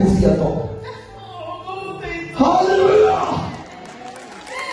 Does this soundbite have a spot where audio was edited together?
no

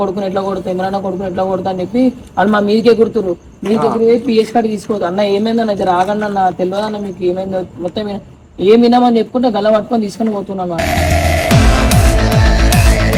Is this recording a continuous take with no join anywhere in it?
yes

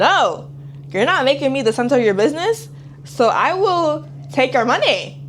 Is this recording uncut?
yes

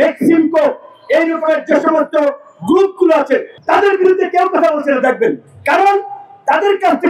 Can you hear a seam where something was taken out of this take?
yes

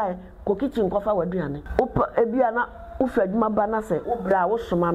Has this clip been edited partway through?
yes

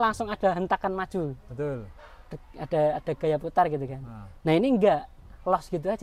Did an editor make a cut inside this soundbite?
no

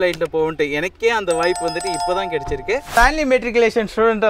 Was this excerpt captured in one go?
no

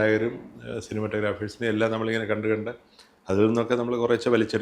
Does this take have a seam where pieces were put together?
no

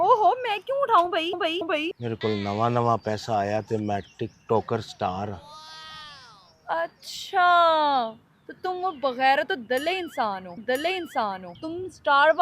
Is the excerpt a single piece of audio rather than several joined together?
no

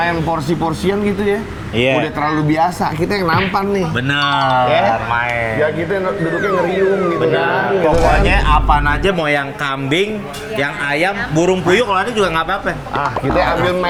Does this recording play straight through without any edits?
yes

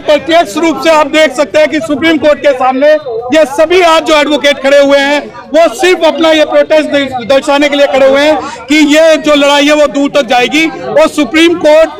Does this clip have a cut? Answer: no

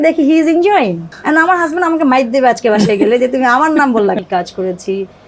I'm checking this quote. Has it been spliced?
yes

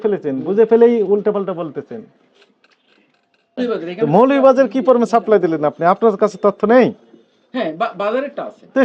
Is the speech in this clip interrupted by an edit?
yes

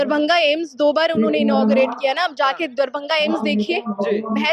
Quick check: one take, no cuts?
yes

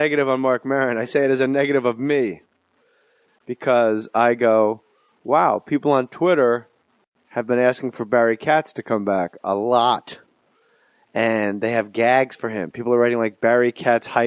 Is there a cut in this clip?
yes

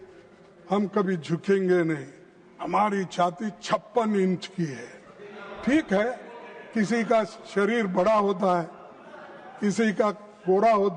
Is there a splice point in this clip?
no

